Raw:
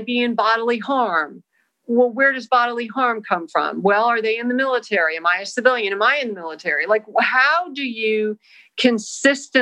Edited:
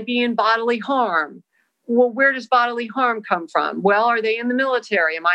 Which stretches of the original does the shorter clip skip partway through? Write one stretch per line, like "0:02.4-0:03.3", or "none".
none